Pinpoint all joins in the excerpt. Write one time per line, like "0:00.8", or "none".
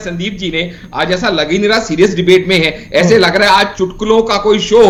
none